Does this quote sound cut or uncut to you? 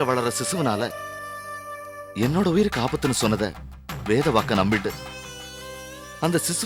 uncut